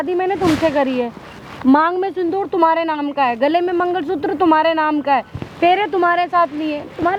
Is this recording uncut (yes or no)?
yes